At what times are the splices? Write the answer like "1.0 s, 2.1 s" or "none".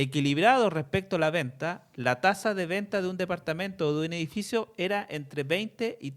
none